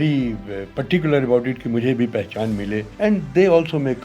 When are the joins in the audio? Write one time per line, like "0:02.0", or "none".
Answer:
0:02.9